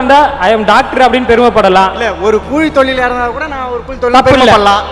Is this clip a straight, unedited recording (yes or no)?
yes